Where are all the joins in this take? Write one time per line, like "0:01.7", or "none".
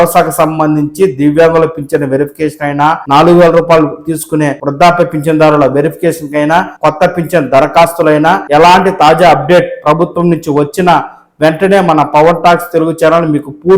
0:03.0
0:04.6
0:06.7
0:08.4